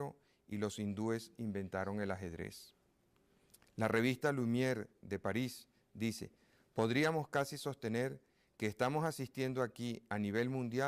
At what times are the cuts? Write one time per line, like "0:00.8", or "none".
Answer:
0:03.1